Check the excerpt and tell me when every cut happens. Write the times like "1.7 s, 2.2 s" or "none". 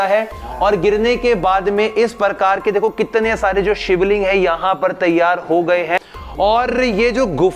6.0 s